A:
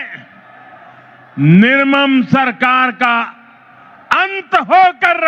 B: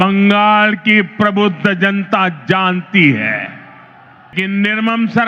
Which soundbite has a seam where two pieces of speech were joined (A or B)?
B